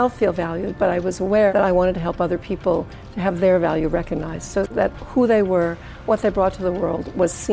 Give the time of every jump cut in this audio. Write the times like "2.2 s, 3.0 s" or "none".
1.5 s, 4.8 s